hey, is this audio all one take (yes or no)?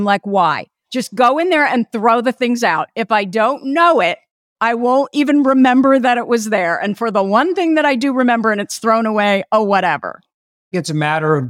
no